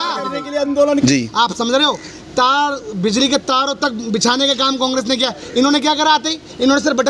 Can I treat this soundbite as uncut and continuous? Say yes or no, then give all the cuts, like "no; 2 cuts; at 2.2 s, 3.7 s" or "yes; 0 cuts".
no; 1 cut; at 1.0 s